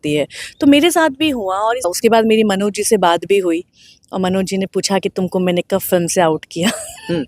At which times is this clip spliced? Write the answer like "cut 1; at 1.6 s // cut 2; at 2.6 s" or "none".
cut 1; at 1.9 s